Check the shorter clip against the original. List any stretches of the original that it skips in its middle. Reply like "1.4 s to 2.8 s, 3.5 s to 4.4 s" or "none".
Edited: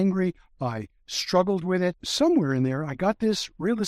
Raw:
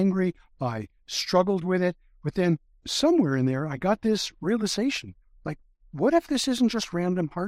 2.0 s to 2.9 s

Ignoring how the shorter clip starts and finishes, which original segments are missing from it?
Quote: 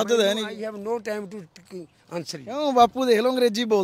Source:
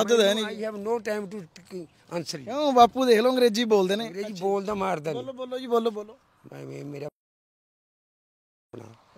none

